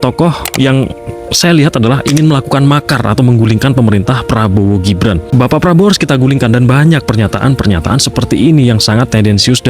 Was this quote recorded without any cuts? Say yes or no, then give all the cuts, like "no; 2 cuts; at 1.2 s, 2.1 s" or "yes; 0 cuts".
no; 1 cut; at 5.2 s